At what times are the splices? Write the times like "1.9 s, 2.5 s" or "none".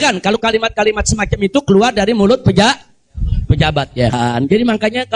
4.1 s